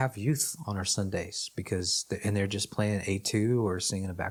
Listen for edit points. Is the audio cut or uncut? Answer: uncut